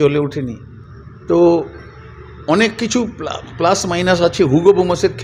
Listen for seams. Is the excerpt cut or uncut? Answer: uncut